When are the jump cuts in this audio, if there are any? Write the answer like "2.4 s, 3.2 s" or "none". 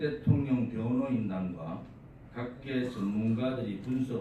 none